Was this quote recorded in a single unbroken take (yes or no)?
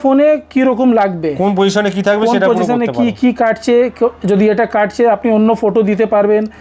yes